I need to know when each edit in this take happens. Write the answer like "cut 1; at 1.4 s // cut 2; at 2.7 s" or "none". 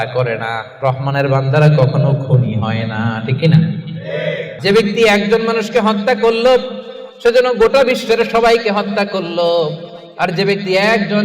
cut 1; at 4.5 s